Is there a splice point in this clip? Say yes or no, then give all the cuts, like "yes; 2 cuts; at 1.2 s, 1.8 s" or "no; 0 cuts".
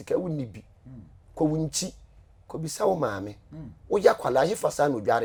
no; 0 cuts